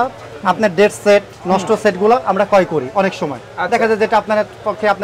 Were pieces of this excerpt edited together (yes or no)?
no